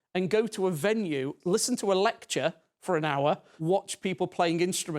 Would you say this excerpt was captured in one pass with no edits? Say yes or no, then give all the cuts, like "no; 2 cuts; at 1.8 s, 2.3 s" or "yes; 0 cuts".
no; 2 cuts; at 1.4 s, 3.5 s